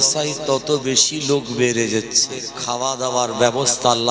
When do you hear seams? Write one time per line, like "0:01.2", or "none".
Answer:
0:02.6